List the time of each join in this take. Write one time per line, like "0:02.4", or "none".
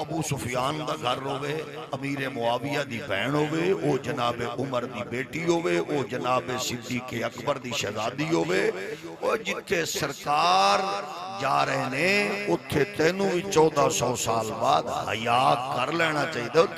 none